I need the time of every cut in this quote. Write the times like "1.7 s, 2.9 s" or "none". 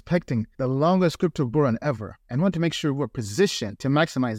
none